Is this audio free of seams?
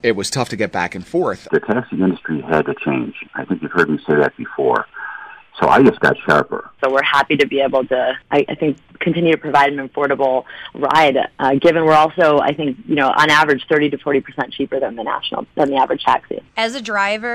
no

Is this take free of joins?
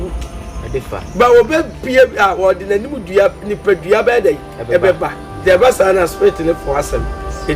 no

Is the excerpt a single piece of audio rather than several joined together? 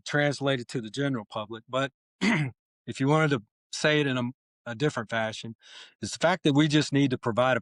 yes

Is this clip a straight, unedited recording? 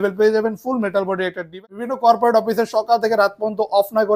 no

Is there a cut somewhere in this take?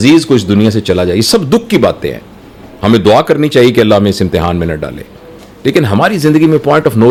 no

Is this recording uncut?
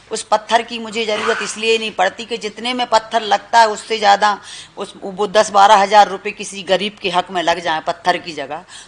yes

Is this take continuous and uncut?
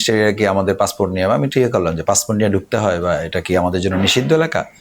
yes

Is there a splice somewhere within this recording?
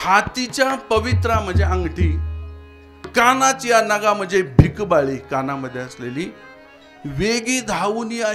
no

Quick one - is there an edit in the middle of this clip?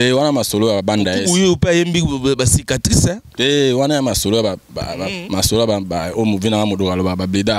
no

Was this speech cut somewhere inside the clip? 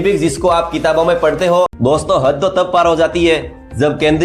yes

